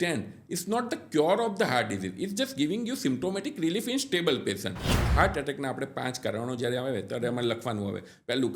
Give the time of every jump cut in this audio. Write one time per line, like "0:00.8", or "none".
0:04.9